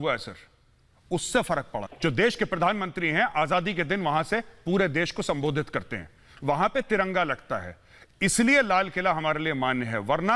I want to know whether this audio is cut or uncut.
cut